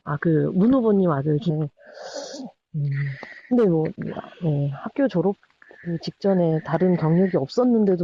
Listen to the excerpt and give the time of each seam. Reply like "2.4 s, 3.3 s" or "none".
none